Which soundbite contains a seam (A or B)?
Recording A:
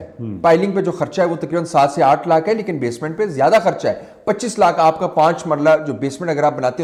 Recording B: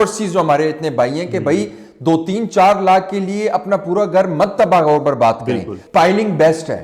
B